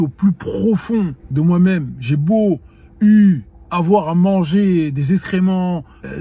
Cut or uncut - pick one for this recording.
cut